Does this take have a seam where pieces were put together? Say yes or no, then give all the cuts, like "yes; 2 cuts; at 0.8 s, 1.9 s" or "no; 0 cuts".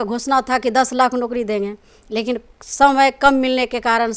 no; 0 cuts